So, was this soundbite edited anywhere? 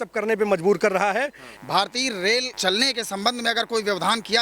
yes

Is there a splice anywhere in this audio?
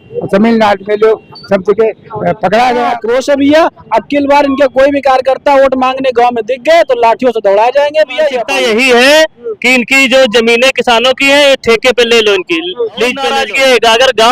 yes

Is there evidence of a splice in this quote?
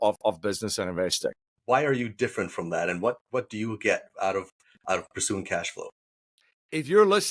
yes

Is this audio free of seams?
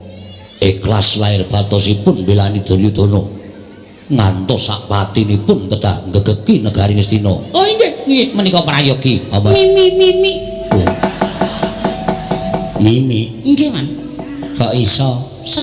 no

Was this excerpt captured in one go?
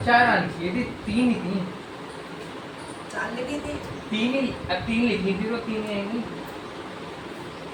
yes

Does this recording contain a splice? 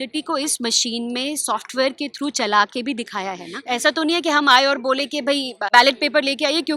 yes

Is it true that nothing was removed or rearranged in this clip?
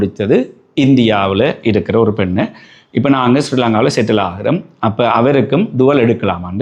yes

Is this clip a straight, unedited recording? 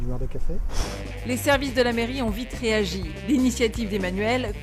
yes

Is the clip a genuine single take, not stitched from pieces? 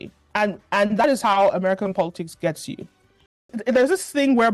no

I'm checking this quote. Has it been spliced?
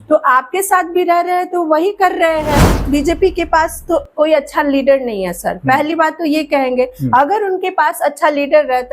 yes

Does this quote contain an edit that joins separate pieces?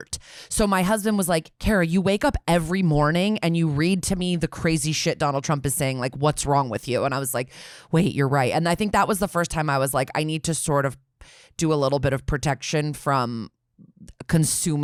no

